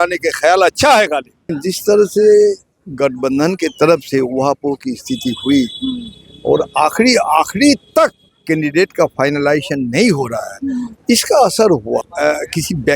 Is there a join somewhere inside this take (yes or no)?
yes